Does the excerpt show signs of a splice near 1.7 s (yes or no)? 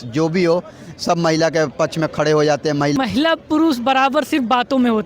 no